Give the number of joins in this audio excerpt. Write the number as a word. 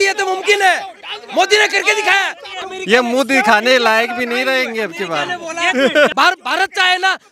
two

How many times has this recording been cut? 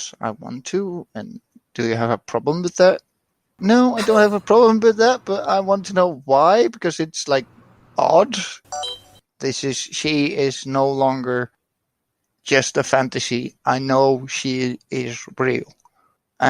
one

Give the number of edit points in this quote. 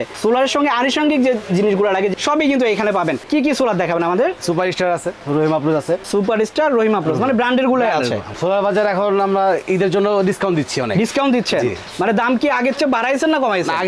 five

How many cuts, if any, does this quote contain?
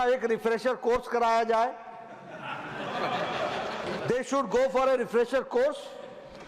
one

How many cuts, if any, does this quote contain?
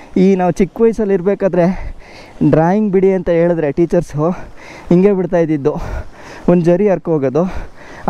zero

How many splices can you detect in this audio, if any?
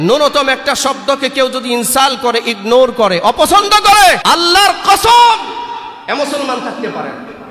one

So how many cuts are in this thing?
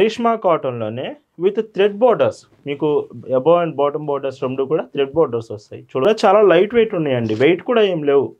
one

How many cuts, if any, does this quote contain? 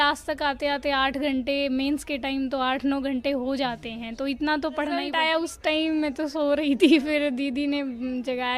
one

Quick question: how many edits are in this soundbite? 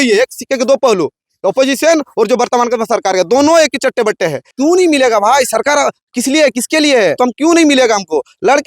two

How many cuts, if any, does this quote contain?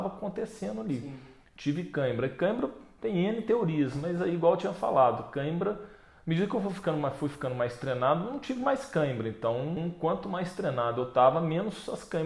one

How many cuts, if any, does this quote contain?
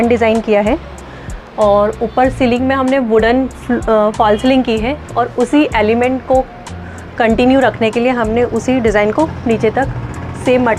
zero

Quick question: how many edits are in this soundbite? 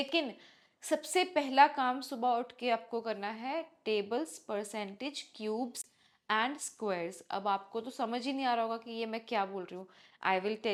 zero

